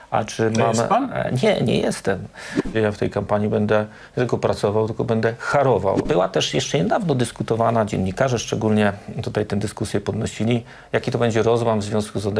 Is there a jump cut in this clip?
yes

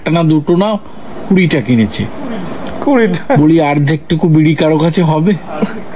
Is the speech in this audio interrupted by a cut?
no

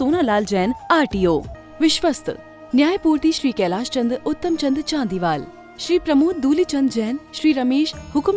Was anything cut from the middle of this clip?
yes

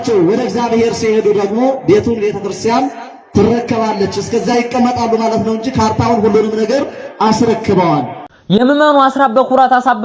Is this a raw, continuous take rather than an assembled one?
no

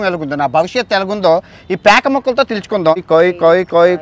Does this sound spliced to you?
yes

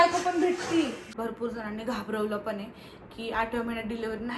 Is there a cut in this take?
yes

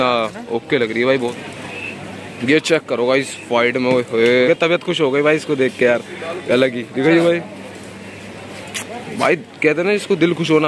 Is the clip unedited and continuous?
no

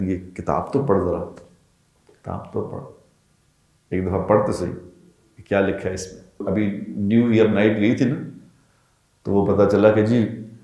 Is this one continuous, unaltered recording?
no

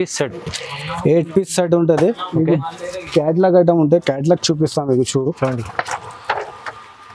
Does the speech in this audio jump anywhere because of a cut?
no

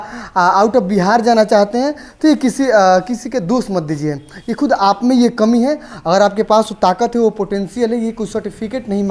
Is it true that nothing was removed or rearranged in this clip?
yes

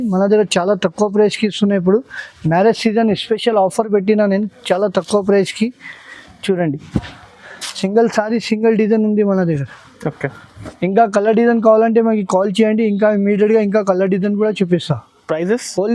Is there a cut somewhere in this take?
no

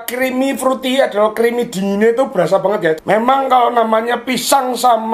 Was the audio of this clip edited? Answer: yes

